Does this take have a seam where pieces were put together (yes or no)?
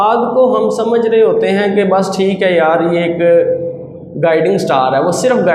no